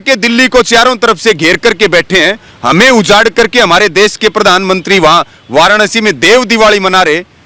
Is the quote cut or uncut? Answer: uncut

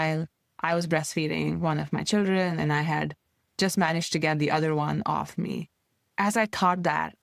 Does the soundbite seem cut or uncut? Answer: uncut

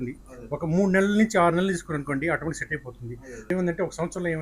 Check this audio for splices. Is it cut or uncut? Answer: cut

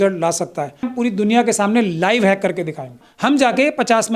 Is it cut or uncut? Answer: cut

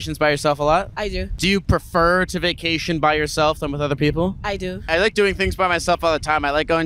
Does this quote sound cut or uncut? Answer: cut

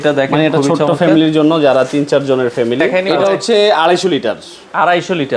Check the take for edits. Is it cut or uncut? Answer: cut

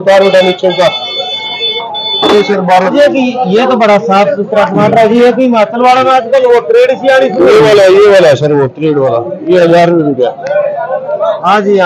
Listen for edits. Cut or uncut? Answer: cut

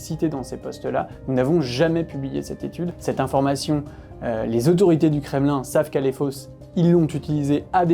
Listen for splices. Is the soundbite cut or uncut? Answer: cut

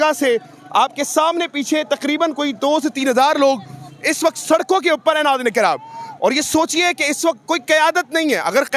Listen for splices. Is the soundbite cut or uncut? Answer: uncut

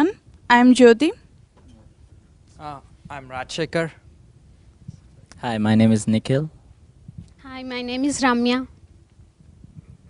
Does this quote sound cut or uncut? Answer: uncut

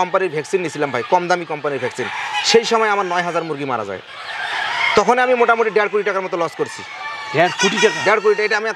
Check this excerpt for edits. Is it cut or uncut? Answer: uncut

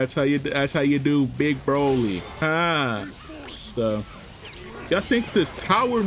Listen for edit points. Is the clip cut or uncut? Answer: cut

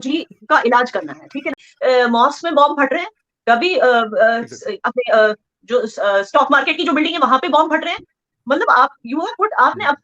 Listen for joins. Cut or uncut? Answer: cut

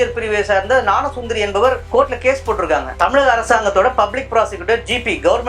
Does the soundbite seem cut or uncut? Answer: cut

